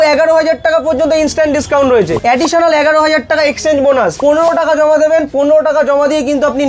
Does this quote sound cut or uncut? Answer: cut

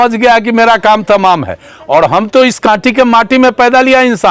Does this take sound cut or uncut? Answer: uncut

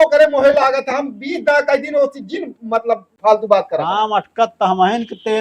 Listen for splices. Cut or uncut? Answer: cut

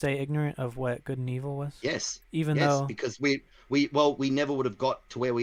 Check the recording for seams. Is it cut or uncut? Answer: uncut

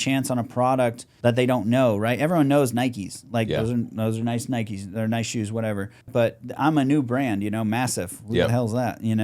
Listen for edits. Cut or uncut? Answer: cut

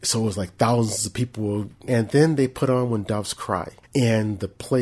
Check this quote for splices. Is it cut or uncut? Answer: cut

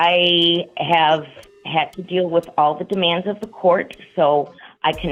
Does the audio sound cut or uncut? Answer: uncut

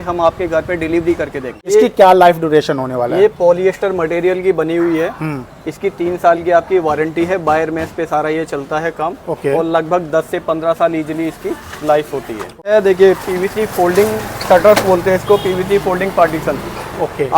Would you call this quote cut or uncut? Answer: cut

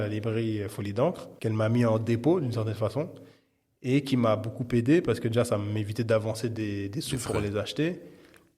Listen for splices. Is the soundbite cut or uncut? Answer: cut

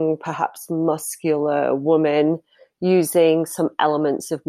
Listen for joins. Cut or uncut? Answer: uncut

